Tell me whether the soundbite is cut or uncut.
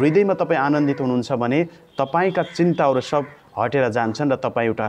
uncut